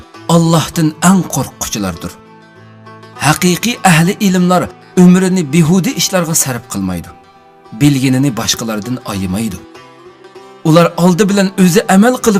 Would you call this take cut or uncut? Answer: cut